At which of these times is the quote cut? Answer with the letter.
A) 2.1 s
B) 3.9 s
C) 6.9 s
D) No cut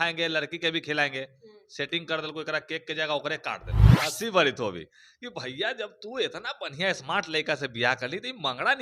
B